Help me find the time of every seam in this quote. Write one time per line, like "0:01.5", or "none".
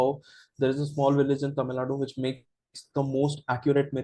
none